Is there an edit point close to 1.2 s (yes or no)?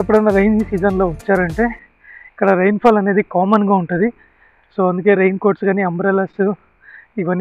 no